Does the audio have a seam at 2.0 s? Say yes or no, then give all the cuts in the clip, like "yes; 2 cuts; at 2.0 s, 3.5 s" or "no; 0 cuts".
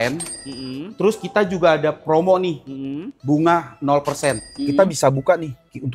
no; 1 cut; at 4.5 s